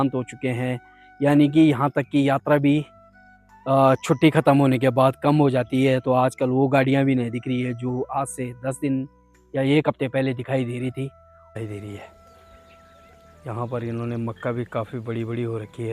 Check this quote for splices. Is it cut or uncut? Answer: cut